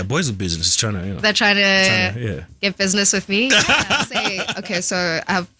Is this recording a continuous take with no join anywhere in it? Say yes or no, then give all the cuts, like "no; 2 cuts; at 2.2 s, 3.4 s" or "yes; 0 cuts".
no; 1 cut; at 4.5 s